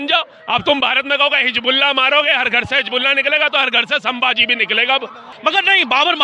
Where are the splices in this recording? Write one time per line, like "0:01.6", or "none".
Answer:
0:05.2